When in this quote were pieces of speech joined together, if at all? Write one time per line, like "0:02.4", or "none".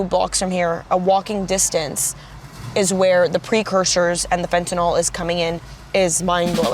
0:05.7